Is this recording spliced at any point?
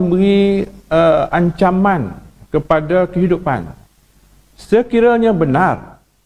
no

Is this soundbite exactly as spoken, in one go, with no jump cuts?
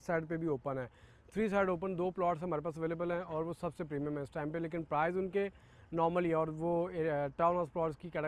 yes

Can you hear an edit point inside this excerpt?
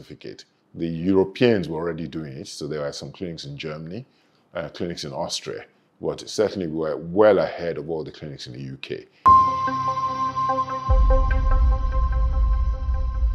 yes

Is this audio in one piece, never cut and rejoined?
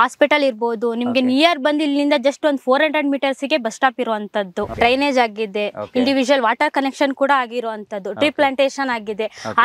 no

